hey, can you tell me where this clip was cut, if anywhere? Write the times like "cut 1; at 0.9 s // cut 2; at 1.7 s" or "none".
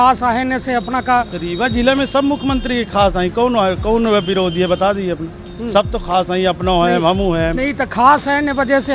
none